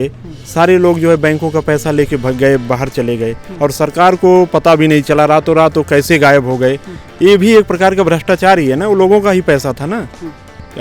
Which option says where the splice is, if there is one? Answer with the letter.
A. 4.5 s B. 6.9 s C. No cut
C